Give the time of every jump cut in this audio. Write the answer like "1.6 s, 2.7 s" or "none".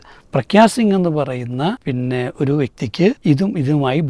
1.8 s, 3.2 s